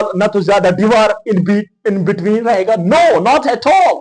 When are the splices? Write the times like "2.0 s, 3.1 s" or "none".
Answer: none